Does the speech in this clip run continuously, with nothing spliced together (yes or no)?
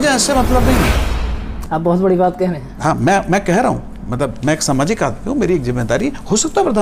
yes